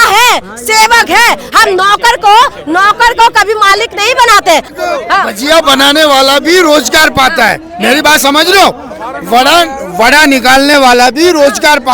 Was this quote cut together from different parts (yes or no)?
yes